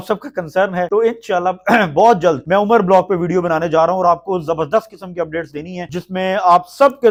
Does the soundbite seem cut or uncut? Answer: uncut